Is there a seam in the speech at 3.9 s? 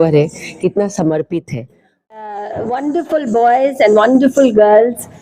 no; 1 cut; at 2.1 s

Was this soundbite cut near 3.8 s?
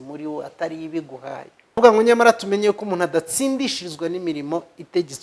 no; 1 cut; at 1.8 s

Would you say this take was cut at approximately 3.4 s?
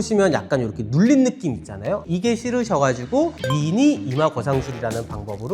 yes; 2 cuts; at 2.0 s, 3.4 s

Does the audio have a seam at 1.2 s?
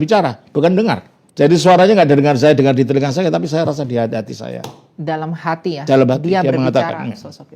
yes; 1 cut; at 1.2 s

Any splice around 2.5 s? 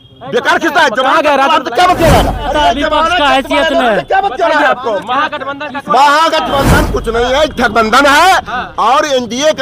yes; 1 cut; at 2.5 s

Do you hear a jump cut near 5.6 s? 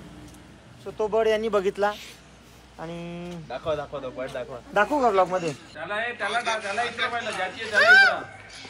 yes; 1 cut; at 5.6 s

